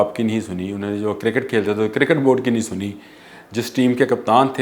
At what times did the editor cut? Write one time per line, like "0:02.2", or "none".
none